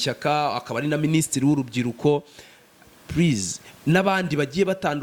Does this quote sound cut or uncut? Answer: uncut